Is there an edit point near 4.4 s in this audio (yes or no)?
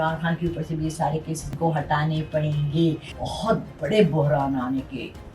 no